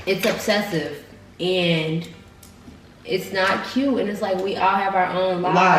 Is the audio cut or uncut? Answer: uncut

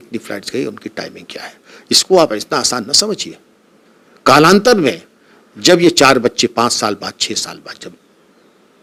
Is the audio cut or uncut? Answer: uncut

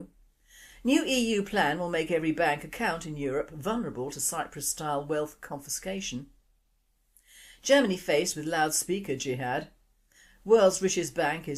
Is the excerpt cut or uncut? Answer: cut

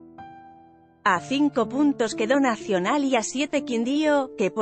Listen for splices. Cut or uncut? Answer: cut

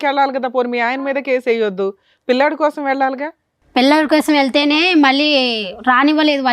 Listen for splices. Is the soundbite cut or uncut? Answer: uncut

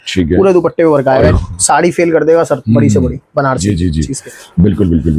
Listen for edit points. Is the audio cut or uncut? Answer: cut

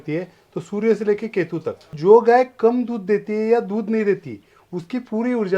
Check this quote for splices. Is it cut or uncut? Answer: cut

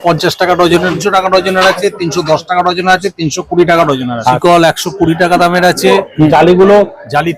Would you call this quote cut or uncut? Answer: cut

